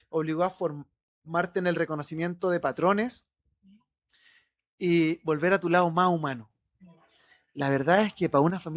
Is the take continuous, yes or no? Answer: no